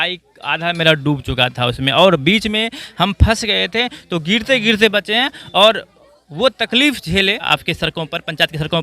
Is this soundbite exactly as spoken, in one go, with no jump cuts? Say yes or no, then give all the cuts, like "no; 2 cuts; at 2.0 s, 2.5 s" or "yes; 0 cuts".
no; 1 cut; at 7.5 s